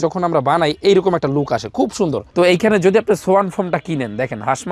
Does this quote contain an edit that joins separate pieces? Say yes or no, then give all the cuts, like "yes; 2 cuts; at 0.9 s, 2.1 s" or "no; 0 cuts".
yes; 1 cut; at 2.2 s